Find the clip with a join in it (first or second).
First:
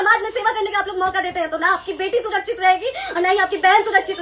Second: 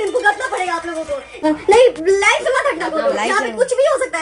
second